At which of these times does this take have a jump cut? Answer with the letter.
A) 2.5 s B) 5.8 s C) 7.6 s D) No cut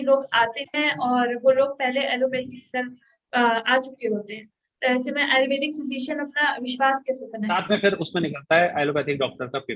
C